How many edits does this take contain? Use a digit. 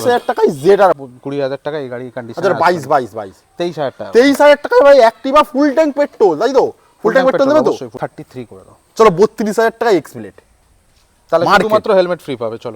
2